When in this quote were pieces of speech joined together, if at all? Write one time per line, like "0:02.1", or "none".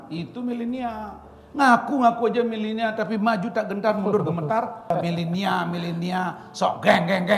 0:04.9